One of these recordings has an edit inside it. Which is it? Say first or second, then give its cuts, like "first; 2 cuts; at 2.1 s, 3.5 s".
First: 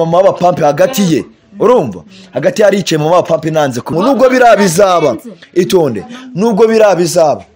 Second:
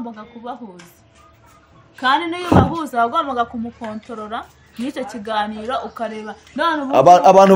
first; 1 cut; at 3.9 s